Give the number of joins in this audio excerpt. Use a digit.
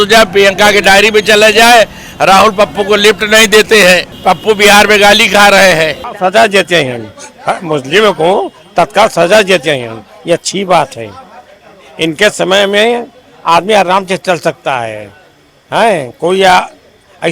2